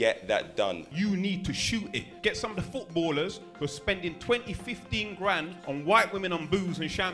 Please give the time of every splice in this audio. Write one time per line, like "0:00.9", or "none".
0:00.8
0:02.1
0:05.5